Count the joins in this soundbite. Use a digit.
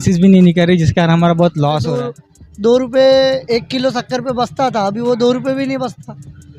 1